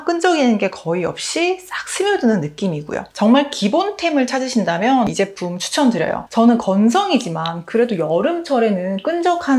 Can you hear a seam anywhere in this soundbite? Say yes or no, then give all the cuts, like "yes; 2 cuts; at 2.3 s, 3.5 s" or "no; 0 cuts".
no; 0 cuts